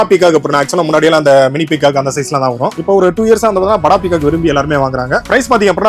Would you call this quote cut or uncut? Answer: uncut